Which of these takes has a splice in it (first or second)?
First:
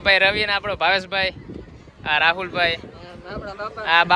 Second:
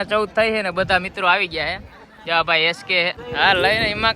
second